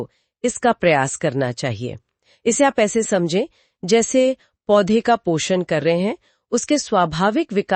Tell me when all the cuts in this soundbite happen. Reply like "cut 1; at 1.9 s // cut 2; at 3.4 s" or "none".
none